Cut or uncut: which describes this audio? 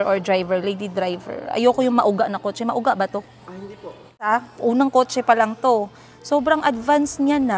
cut